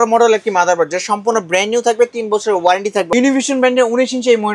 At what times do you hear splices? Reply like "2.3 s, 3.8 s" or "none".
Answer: 3.1 s